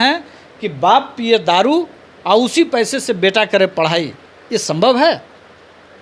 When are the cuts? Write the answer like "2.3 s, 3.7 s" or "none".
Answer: none